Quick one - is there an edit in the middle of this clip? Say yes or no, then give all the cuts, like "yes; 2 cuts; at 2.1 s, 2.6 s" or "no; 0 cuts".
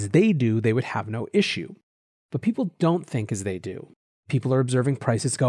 no; 0 cuts